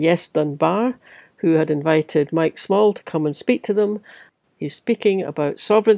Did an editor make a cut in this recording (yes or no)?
no